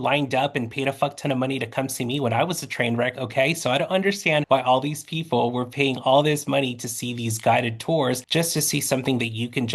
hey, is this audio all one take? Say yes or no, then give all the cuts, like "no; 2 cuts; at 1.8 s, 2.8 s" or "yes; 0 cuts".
yes; 0 cuts